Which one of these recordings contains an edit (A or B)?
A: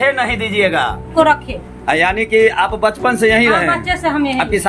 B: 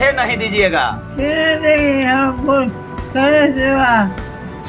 A